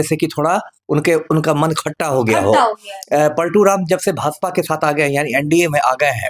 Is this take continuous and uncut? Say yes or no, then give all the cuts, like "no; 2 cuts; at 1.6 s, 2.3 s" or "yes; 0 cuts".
no; 1 cut; at 2.9 s